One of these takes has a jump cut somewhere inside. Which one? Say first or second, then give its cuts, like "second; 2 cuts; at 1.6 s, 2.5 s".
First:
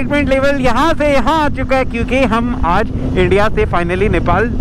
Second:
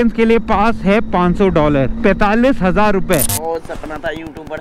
second; 2 cuts; at 1.9 s, 3.3 s